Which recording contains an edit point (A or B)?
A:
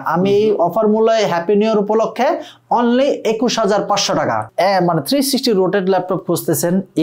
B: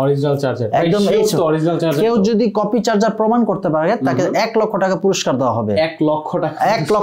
A